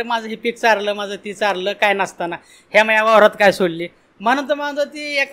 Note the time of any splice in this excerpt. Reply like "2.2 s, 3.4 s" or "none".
none